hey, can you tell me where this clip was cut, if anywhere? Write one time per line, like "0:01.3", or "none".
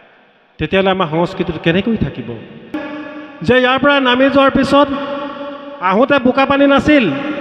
0:02.9